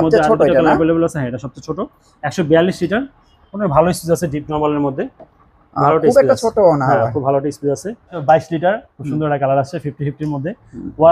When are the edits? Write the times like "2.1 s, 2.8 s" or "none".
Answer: 8.1 s